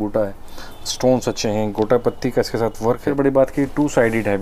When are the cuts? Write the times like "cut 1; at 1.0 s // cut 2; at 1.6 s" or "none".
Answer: cut 1; at 3.1 s